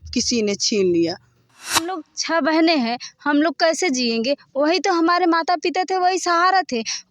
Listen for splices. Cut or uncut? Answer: cut